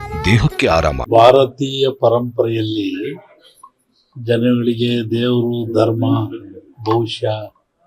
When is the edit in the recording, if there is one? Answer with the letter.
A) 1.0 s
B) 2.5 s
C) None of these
A